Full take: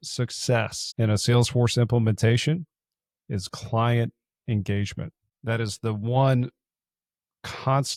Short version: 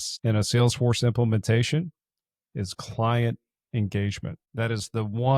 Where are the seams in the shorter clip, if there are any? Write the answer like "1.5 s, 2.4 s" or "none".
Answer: 4.4 s